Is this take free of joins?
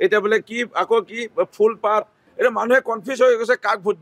no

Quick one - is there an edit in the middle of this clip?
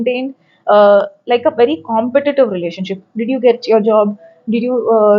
no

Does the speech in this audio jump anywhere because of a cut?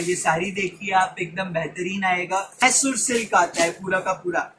yes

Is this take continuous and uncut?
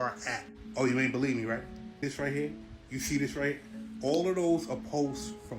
no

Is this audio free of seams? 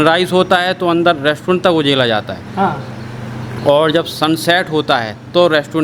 yes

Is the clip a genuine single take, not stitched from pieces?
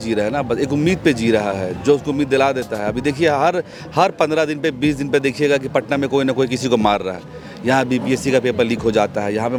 yes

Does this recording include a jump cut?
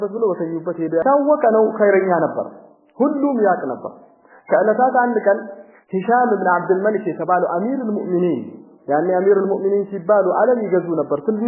yes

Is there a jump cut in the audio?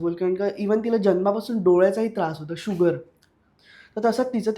no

